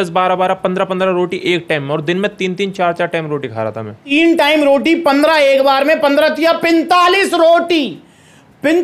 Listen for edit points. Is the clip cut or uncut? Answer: cut